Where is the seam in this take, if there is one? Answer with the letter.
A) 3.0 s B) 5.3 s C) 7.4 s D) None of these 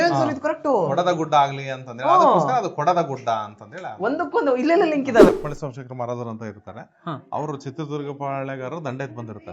B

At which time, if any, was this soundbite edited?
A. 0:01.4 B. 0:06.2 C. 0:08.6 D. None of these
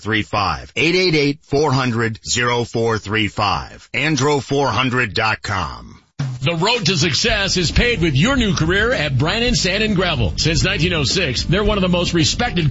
B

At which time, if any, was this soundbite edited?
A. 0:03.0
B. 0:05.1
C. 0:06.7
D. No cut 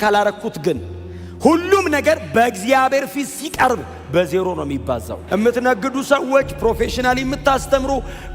B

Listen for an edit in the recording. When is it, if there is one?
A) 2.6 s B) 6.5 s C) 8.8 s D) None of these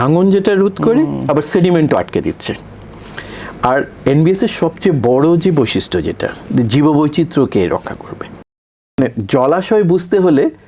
C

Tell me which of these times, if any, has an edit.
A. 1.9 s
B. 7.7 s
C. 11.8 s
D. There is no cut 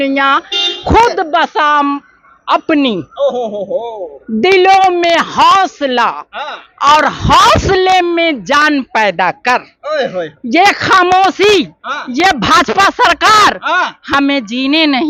D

